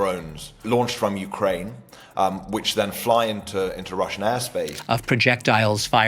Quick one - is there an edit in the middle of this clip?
yes; 1 cut; at 4.8 s

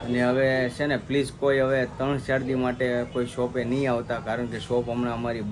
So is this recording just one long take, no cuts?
yes; 0 cuts

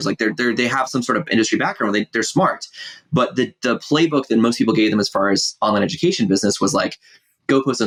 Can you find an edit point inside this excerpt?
no; 0 cuts

